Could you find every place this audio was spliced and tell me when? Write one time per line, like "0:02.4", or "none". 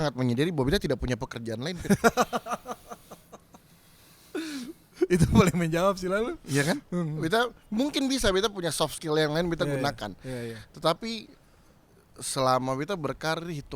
none